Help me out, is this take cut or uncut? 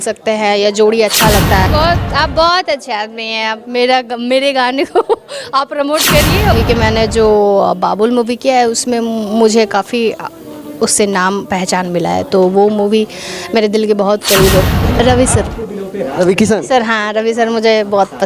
cut